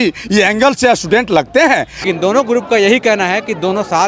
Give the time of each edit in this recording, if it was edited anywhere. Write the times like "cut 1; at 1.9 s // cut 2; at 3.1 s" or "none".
cut 1; at 2.0 s